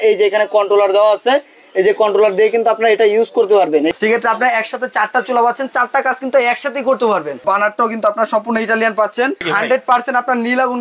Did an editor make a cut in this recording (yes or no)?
yes